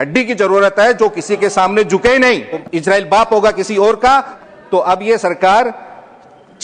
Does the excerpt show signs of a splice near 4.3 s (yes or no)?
yes